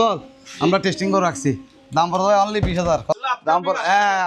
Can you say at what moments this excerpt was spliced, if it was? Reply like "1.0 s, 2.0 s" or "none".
3.1 s